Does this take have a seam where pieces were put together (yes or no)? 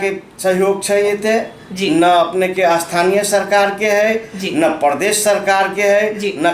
no